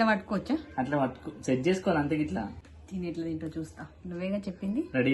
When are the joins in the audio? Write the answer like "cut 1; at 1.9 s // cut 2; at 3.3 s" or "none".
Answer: cut 1; at 2.5 s